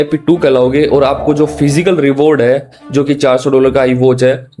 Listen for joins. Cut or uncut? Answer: uncut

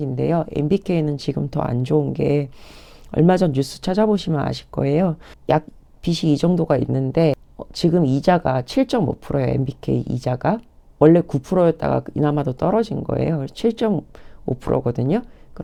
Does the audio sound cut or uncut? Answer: uncut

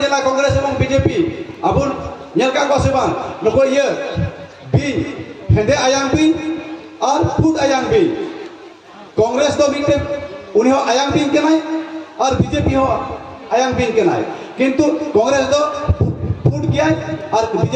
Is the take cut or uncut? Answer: uncut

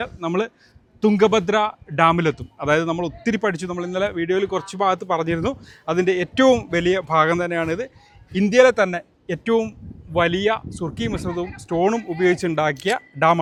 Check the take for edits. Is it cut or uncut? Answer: uncut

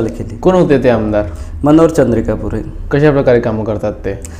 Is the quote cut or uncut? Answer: uncut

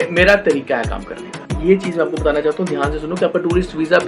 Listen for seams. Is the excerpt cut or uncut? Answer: cut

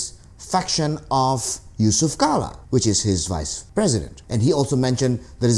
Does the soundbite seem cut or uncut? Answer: cut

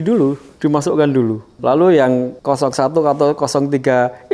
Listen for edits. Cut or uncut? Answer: cut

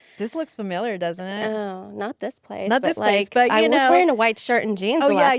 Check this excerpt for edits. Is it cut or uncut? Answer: uncut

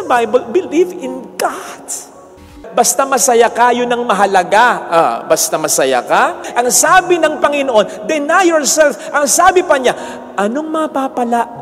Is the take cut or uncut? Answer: cut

